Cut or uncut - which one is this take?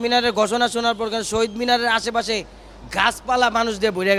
uncut